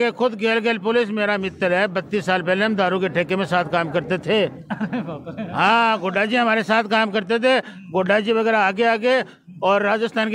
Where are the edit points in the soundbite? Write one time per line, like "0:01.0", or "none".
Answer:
none